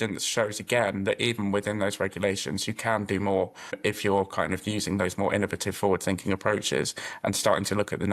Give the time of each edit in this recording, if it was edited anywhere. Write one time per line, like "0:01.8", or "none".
0:03.8